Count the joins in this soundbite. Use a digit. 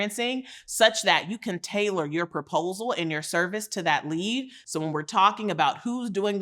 1